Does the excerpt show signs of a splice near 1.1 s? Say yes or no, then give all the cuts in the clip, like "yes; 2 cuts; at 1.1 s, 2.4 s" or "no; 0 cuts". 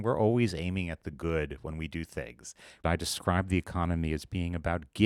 no; 1 cut; at 2.8 s